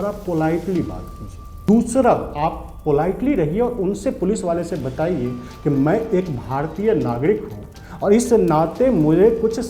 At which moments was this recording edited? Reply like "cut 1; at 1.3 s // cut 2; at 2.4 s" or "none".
cut 1; at 1.5 s